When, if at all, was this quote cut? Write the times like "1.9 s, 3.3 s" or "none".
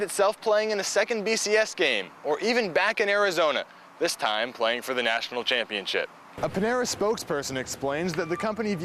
6.2 s